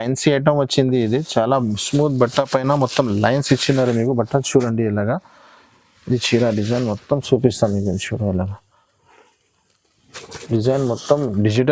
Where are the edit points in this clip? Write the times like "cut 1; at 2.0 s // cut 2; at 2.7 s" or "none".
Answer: none